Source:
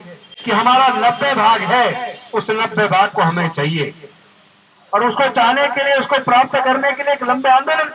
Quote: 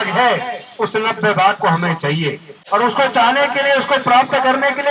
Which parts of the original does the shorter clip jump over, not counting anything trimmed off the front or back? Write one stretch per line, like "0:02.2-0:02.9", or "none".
0:04.0-0:04.7